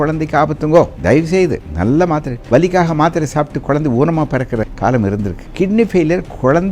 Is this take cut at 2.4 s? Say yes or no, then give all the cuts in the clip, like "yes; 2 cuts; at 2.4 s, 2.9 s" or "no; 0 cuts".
yes; 4 cuts; at 1.3 s, 2.4 s, 4.7 s, 5.4 s